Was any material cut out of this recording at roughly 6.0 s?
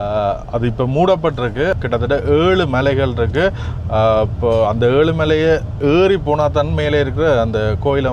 no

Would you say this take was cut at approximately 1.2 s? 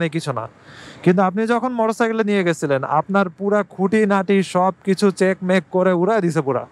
no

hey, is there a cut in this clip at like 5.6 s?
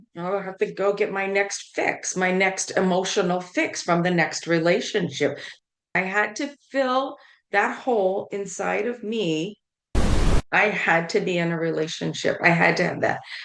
yes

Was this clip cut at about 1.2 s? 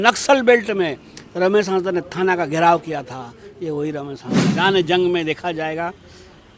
no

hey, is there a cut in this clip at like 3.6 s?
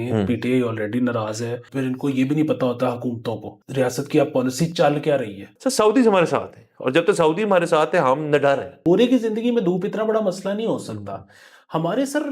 yes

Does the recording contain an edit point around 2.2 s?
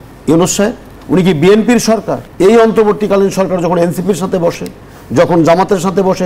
yes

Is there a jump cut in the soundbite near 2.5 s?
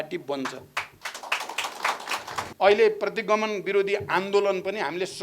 yes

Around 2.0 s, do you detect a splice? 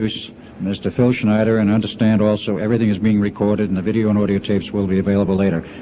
no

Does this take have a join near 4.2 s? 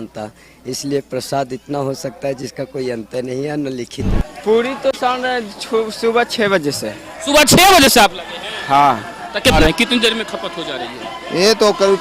yes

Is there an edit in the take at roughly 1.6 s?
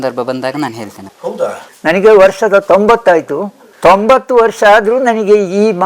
yes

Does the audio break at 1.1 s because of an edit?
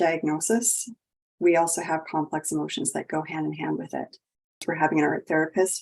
no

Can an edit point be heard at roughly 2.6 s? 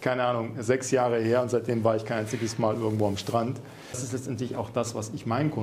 no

